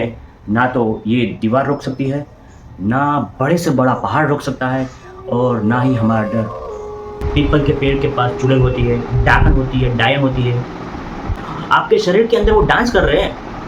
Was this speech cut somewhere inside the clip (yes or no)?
yes